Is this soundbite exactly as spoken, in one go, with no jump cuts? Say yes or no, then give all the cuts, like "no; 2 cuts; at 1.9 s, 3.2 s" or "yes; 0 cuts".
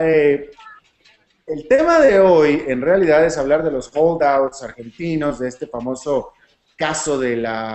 yes; 0 cuts